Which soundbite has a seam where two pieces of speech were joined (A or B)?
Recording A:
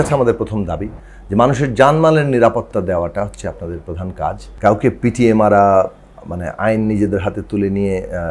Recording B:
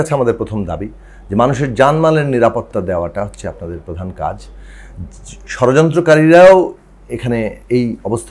A